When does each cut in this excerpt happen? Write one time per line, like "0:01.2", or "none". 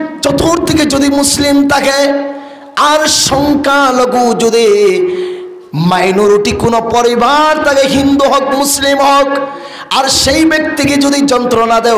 none